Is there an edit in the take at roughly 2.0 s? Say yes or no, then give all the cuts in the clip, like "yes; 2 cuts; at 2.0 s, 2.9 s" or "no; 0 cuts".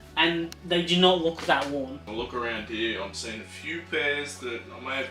yes; 1 cut; at 2.0 s